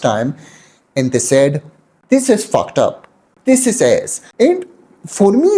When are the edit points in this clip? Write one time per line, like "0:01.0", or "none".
0:04.2

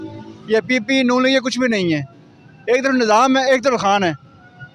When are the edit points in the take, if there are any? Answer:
none

